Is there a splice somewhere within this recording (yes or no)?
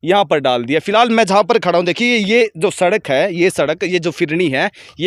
no